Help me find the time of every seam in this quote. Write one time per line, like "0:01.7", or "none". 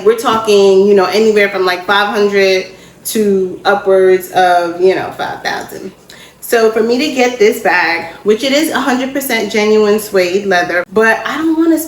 0:10.8

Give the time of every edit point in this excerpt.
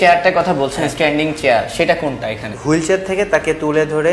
0:02.5

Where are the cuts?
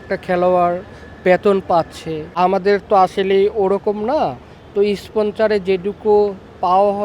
0:02.3

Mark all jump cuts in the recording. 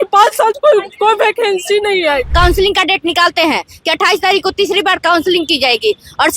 0:02.3

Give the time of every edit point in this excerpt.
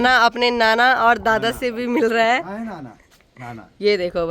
none

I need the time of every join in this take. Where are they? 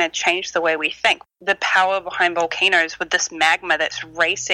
0:01.2

